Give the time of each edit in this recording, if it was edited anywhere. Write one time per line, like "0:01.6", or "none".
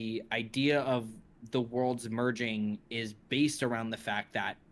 none